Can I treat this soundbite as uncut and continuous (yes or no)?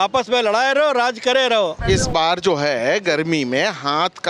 no